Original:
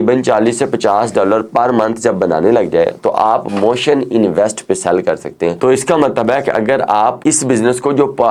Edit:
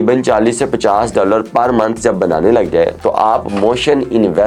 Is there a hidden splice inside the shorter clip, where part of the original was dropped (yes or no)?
no